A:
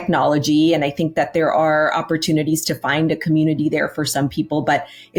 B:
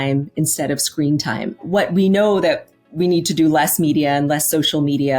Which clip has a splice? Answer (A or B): B